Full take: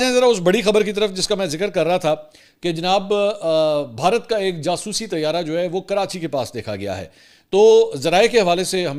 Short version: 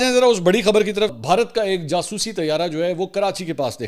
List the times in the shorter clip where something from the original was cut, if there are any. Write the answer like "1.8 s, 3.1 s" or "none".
1.2 s